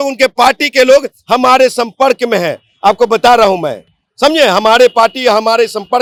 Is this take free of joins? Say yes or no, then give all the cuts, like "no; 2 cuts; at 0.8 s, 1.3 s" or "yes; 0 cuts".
yes; 0 cuts